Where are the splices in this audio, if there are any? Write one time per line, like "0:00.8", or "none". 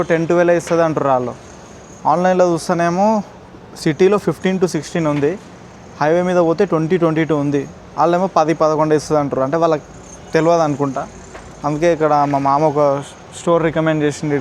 none